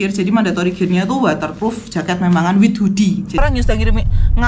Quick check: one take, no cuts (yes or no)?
no